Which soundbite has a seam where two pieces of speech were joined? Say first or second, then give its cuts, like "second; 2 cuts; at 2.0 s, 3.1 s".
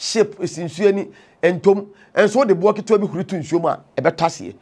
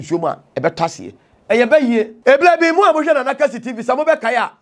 second; 1 cut; at 2.1 s